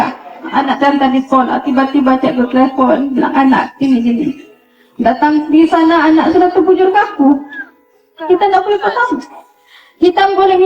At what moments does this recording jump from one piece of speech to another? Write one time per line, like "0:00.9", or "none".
none